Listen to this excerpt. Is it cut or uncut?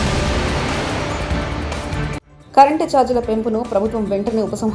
cut